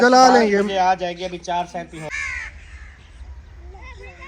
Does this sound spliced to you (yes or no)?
yes